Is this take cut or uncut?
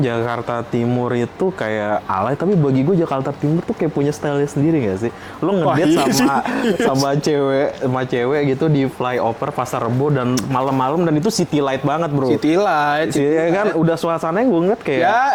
uncut